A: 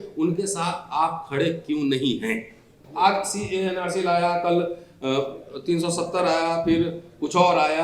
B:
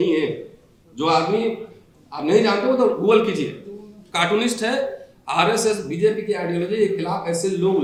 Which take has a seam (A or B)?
A